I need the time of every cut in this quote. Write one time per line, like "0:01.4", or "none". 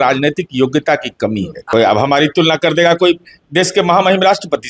0:01.6